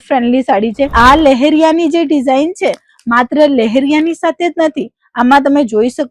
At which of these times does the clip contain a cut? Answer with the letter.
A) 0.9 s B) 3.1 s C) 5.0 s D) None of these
A